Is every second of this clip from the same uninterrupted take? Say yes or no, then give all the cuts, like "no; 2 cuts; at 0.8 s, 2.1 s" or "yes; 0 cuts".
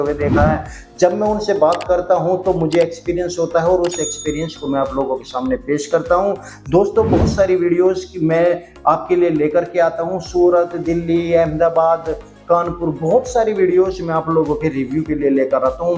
yes; 0 cuts